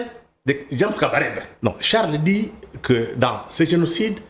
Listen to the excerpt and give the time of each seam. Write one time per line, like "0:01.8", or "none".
0:01.5